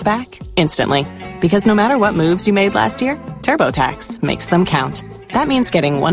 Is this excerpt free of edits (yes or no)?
yes